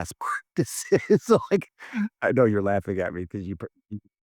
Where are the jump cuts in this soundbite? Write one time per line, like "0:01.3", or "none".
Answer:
none